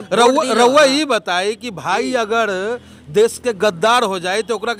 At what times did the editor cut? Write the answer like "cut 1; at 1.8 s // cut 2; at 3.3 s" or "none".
none